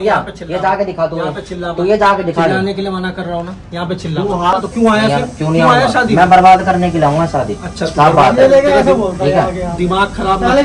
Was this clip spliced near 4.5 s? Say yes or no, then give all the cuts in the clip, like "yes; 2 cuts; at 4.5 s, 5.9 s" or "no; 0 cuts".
yes; 1 cut; at 4.5 s